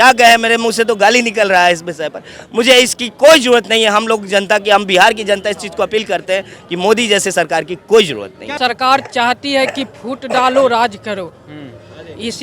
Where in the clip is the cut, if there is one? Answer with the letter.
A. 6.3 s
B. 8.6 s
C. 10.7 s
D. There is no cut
B